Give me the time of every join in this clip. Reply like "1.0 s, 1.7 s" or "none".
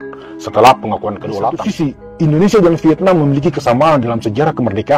1.5 s